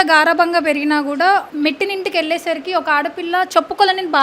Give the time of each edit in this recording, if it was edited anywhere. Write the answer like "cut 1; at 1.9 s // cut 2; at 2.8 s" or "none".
cut 1; at 1.5 s